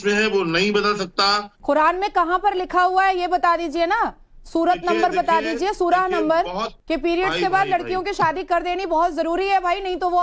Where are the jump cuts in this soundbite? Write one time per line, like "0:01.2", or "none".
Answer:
0:01.5
0:06.7